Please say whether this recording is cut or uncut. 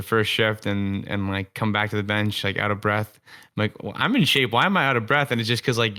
uncut